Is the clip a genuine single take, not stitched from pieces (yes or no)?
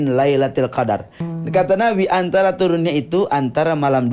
no